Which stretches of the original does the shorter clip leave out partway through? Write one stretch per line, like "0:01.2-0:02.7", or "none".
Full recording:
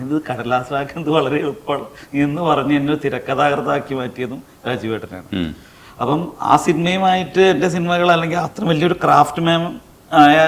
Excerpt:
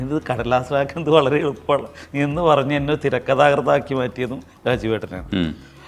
none